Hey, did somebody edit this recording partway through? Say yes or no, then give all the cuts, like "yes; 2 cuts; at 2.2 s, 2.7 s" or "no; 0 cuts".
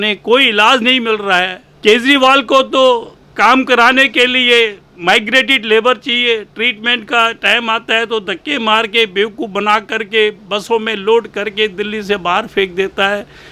yes; 1 cut; at 1.6 s